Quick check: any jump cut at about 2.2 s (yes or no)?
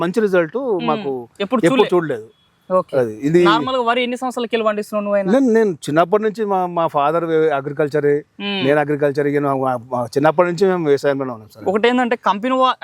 no